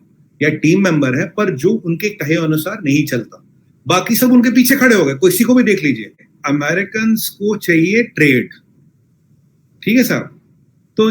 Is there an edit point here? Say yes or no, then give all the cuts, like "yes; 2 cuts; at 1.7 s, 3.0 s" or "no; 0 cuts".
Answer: yes; 1 cut; at 6.1 s